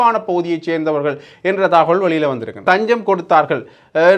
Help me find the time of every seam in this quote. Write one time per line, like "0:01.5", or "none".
0:02.6